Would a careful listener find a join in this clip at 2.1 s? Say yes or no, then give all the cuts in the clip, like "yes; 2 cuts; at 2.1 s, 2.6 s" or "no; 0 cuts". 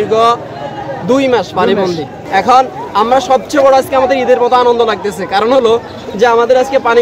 no; 0 cuts